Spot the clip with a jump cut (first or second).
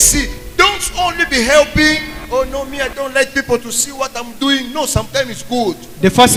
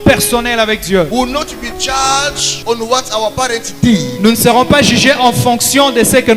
second